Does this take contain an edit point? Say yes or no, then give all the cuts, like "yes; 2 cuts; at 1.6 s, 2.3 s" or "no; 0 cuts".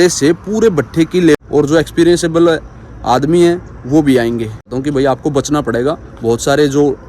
yes; 2 cuts; at 1.4 s, 4.7 s